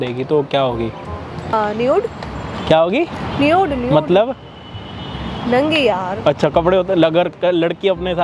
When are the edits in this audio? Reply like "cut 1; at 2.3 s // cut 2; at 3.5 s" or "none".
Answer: none